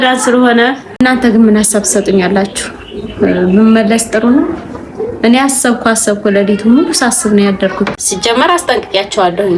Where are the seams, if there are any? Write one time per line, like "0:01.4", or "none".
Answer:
0:01.0
0:07.9